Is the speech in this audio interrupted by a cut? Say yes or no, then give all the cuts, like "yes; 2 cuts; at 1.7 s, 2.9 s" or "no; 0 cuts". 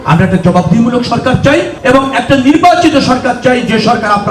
yes; 1 cut; at 1.7 s